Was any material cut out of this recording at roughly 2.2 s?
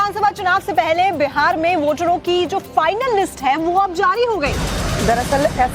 yes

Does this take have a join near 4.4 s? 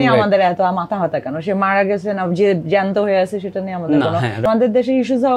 yes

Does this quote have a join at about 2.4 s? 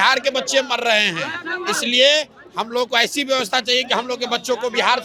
no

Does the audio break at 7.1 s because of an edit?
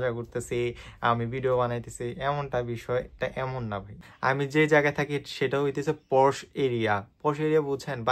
no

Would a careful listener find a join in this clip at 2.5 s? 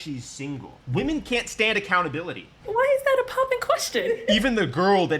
yes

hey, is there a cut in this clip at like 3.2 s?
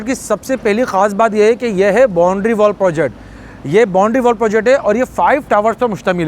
no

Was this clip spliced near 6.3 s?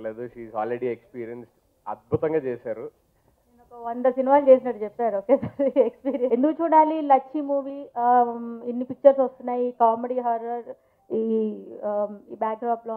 yes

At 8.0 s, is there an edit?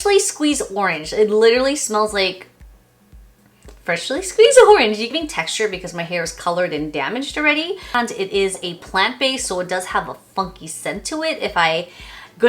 yes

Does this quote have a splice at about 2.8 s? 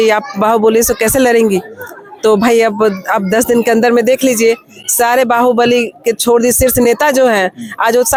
no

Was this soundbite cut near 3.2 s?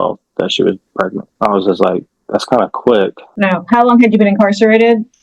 yes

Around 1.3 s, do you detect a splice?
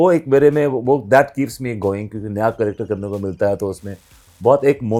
no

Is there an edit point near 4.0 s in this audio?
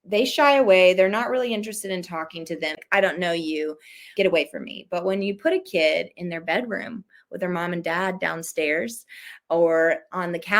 yes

